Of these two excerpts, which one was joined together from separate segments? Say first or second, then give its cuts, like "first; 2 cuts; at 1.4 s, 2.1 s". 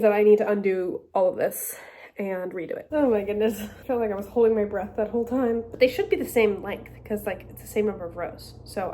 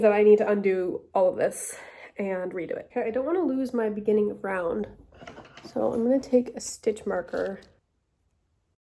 first; 2 cuts; at 2.8 s, 5.7 s